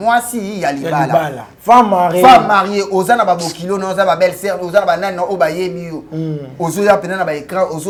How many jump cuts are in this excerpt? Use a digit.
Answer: 0